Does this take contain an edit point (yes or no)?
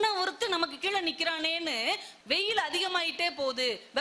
yes